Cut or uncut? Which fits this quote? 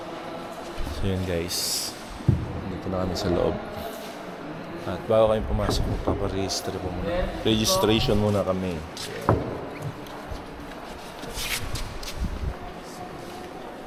uncut